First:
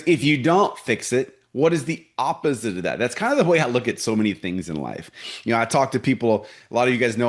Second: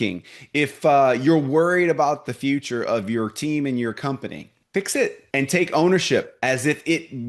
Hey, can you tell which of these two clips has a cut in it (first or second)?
second